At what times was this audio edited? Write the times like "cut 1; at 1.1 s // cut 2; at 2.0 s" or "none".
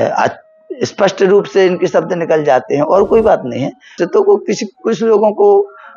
cut 1; at 3.9 s